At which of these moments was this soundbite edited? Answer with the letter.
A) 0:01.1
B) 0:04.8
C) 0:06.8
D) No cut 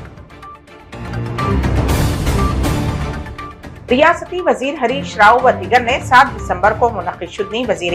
A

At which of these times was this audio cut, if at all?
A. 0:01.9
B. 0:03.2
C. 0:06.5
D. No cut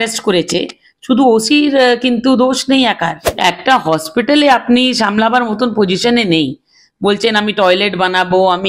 B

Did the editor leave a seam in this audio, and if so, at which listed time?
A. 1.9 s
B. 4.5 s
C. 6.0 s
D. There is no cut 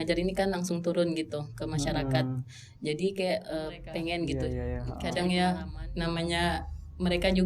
B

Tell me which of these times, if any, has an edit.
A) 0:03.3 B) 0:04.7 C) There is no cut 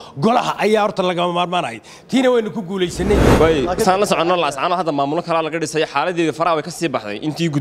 A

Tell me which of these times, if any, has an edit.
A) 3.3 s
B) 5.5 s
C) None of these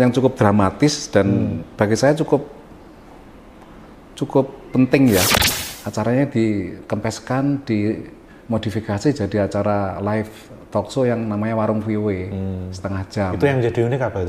B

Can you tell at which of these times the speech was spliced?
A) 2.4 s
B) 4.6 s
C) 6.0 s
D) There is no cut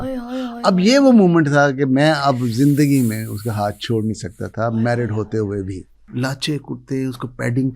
C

